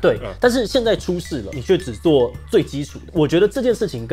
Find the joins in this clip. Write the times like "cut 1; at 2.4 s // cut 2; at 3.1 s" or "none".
cut 1; at 1.6 s // cut 2; at 2.9 s